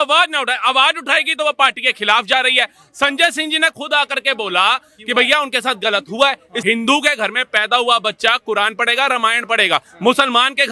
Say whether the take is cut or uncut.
cut